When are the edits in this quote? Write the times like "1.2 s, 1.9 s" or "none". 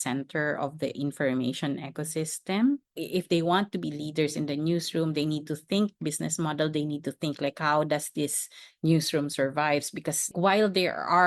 2.9 s, 10.3 s

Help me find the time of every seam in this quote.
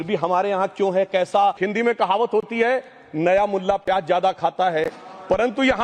1.6 s

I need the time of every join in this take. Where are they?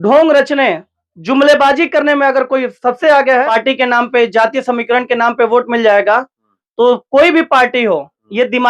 3.5 s

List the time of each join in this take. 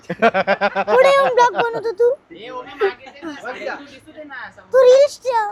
none

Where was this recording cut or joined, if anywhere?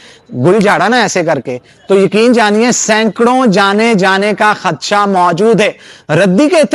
none

